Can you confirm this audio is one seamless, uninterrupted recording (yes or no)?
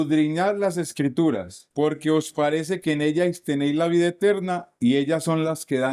yes